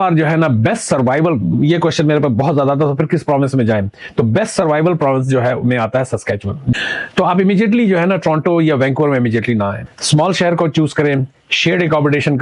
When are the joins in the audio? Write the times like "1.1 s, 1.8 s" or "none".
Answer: 6.7 s